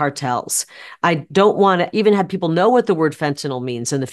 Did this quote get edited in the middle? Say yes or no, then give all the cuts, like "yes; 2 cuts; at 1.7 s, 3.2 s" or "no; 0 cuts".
yes; 1 cut; at 1.9 s